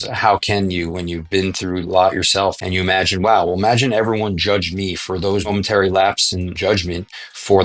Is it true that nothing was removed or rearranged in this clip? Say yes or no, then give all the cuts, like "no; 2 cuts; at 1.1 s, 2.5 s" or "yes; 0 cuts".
no; 3 cuts; at 2.6 s, 5.5 s, 6.5 s